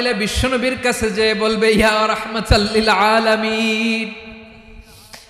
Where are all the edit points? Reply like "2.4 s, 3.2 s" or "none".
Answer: none